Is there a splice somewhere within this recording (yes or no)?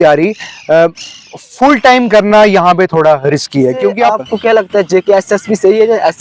yes